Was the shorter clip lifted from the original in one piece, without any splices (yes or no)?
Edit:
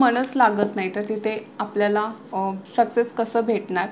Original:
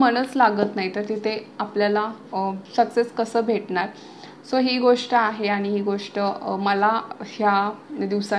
yes